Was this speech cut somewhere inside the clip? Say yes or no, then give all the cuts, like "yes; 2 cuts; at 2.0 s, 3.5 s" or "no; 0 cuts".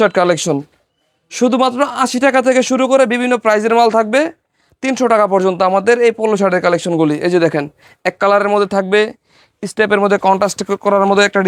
no; 0 cuts